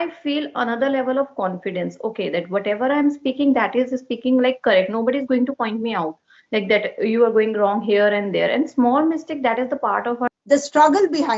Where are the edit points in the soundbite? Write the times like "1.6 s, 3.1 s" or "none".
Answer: 10.3 s